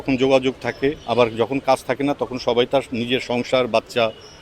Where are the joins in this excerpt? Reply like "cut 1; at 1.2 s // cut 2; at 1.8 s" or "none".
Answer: cut 1; at 1.0 s